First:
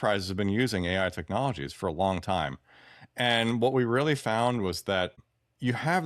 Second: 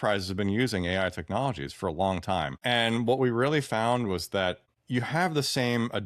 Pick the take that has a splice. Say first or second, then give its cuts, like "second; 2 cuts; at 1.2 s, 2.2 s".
second; 2 cuts; at 2.5 s, 4.7 s